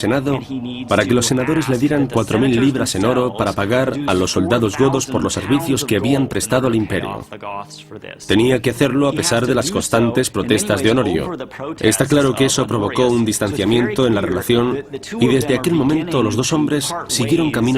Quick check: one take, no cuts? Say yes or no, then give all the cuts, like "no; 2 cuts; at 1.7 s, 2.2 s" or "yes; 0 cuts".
no; 1 cut; at 3.7 s